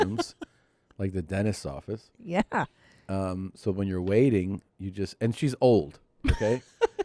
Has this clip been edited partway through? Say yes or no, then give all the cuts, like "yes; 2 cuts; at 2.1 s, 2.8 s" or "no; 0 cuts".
no; 0 cuts